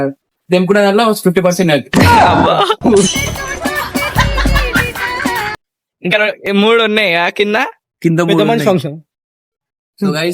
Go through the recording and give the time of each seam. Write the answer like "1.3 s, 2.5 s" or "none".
5.5 s